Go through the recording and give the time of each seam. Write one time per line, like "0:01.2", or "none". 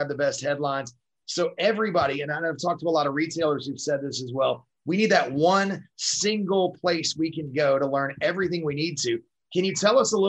none